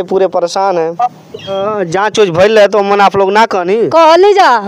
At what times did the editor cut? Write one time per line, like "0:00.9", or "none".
0:01.6